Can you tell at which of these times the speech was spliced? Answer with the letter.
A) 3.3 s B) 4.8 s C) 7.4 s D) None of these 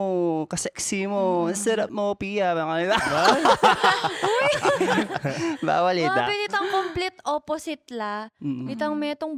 D